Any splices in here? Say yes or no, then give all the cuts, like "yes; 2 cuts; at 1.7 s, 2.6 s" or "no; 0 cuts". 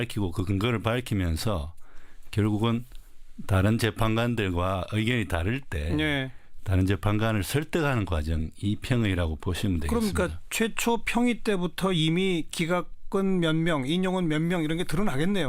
no; 0 cuts